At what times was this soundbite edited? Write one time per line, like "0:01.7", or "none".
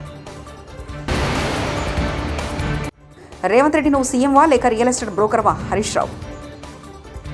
0:00.9
0:03.0